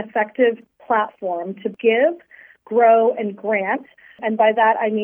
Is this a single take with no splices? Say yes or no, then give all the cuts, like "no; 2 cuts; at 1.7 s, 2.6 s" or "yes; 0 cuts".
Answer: no; 2 cuts; at 1.7 s, 4.2 s